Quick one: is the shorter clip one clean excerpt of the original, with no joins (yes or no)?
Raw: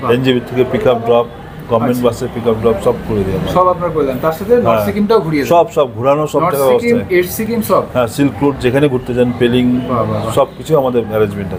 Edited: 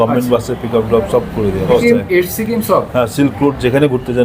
no